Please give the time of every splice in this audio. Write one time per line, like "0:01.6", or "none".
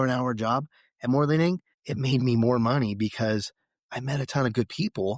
none